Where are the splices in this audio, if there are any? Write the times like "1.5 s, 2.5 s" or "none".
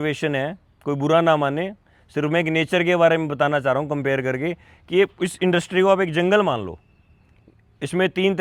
none